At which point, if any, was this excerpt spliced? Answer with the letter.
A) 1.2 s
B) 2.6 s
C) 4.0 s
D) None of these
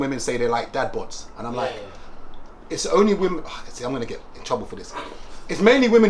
D